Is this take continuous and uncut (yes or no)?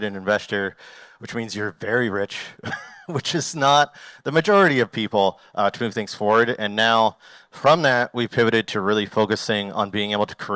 yes